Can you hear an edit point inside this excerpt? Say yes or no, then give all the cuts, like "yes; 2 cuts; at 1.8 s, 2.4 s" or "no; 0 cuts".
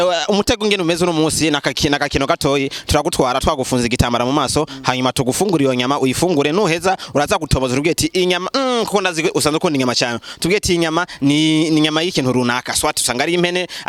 no; 0 cuts